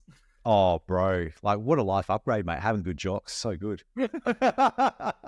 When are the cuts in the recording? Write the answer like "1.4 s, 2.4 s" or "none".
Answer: none